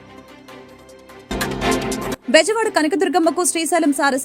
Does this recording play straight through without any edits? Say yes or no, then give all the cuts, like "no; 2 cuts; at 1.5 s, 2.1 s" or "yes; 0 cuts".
no; 2 cuts; at 1.1 s, 2.2 s